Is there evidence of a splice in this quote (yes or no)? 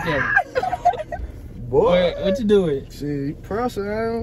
no